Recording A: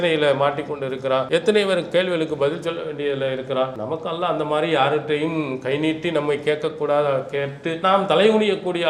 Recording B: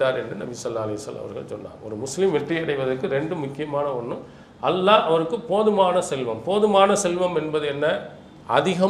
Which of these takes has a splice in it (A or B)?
A